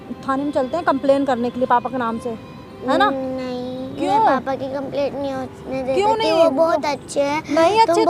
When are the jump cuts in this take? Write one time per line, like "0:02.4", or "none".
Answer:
none